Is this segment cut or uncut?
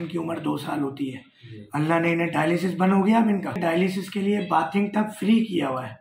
cut